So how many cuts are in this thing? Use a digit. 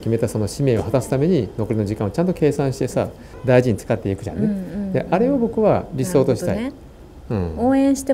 1